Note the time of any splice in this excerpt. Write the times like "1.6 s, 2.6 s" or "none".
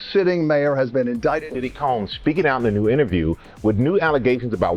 1.5 s